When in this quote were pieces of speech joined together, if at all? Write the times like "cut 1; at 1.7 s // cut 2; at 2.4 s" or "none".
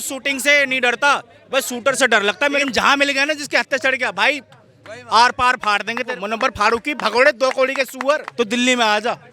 cut 1; at 2.6 s // cut 2; at 6.1 s // cut 3; at 8.3 s